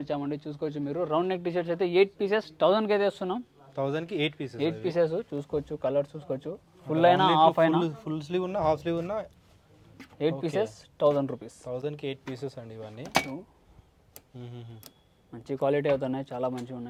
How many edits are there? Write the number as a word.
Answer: zero